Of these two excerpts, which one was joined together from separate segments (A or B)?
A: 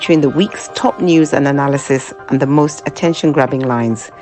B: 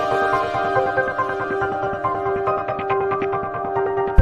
B